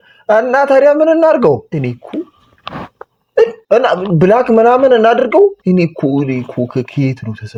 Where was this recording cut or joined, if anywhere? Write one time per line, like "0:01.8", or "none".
none